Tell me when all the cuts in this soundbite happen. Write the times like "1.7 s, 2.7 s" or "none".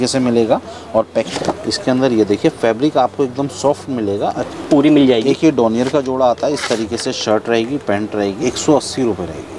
1.3 s, 4.5 s, 8.4 s